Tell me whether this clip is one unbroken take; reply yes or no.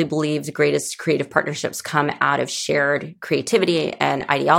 yes